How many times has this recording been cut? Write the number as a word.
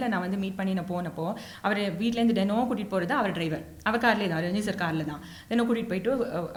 zero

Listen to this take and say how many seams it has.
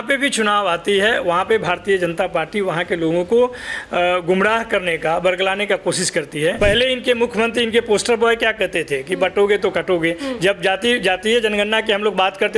one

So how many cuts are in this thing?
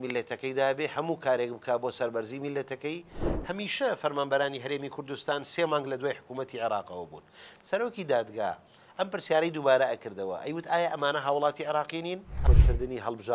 two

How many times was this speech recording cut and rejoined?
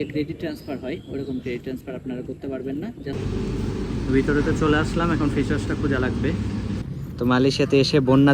two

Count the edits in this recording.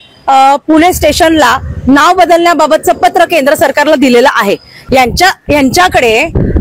one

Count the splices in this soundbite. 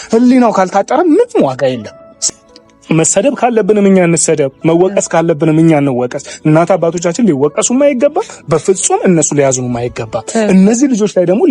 one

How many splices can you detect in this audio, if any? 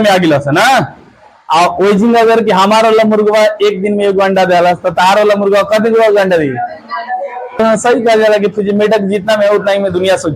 one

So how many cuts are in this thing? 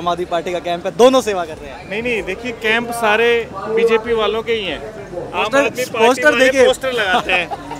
zero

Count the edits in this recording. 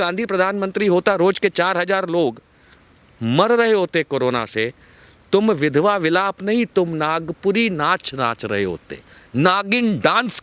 zero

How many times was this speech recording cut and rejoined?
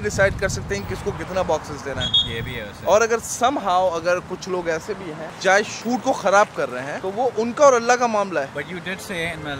zero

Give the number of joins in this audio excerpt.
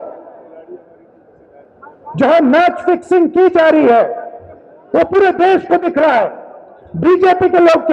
zero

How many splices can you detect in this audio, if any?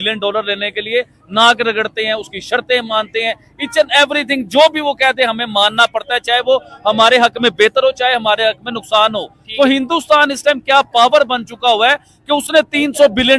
zero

